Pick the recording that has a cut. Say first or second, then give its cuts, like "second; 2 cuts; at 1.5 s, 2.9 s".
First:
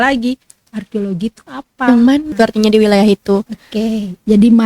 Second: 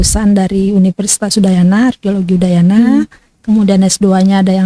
first; 1 cut; at 2.3 s